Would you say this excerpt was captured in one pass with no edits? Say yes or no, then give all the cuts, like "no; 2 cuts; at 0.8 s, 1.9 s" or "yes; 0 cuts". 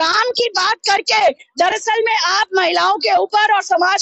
yes; 0 cuts